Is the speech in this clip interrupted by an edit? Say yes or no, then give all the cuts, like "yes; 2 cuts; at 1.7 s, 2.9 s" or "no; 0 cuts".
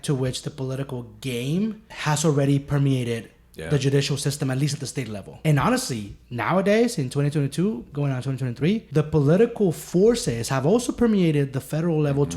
yes; 3 cuts; at 1.9 s, 5.3 s, 8.9 s